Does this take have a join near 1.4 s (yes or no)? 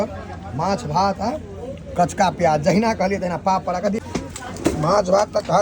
no